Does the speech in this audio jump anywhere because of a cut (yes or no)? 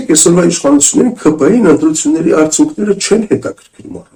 no